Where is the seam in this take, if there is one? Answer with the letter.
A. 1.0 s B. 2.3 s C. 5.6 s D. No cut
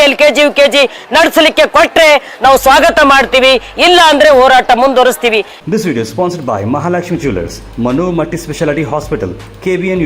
C